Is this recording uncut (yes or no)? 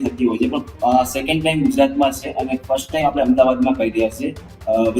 yes